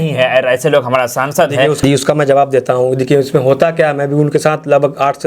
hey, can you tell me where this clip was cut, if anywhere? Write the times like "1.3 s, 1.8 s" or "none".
none